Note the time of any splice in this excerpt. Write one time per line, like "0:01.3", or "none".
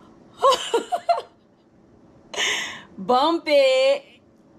none